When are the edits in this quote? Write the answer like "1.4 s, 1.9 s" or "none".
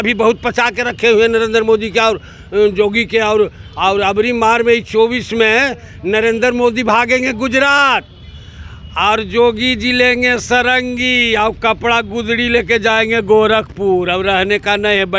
none